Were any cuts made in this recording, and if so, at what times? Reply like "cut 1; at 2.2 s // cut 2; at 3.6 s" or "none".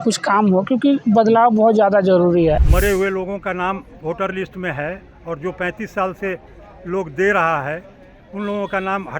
cut 1; at 2.6 s